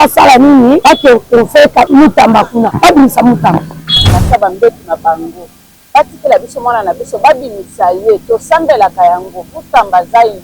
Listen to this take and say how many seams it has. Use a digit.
4